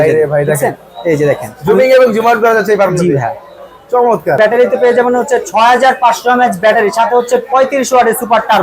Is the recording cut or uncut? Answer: cut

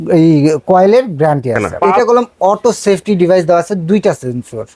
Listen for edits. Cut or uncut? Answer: cut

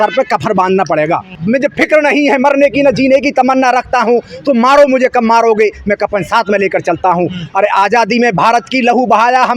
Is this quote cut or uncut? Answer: cut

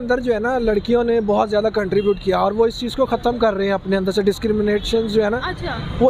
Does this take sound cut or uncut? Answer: uncut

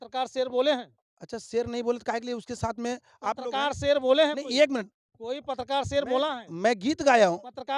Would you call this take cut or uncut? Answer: uncut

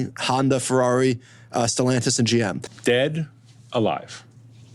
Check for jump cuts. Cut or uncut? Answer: cut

